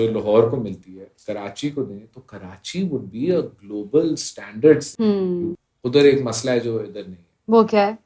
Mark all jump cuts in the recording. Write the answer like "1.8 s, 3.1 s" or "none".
5.3 s